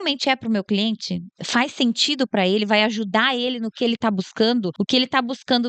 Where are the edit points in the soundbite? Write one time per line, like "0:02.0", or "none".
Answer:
0:04.8